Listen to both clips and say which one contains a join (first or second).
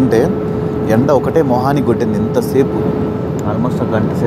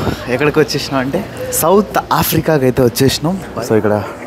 second